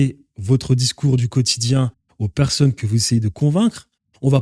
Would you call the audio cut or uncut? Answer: uncut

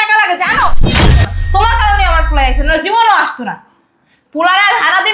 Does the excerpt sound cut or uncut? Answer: cut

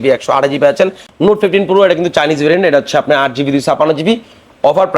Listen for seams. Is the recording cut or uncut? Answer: cut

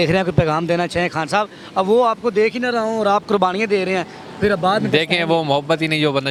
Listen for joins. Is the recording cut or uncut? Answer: uncut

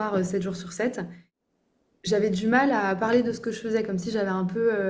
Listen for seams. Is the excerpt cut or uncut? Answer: cut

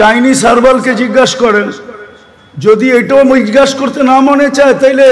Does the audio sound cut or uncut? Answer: uncut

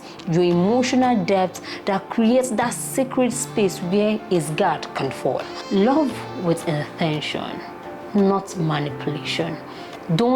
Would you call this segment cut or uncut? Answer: cut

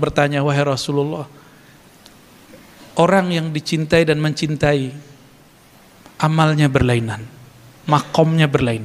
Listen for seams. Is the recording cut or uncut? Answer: uncut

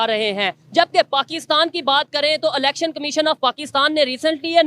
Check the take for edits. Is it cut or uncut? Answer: uncut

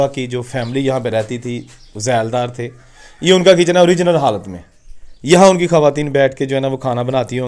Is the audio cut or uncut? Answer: uncut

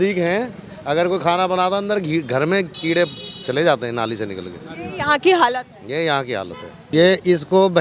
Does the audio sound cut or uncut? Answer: cut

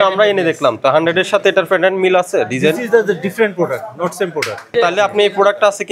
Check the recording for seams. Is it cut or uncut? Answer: cut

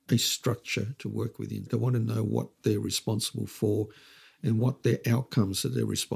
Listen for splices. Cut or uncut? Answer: cut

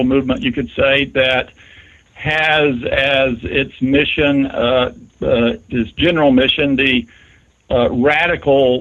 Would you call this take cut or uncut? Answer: uncut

